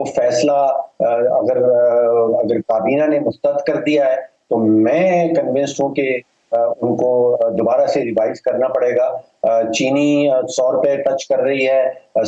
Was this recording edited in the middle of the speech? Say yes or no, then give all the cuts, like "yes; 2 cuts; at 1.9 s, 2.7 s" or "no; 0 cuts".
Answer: no; 0 cuts